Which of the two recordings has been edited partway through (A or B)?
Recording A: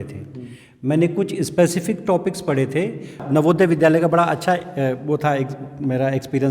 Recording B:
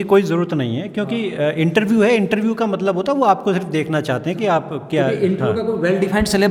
A